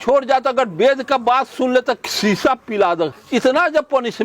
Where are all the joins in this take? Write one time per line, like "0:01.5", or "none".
0:02.1
0:03.2